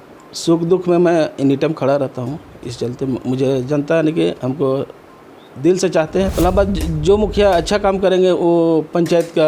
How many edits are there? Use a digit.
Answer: 1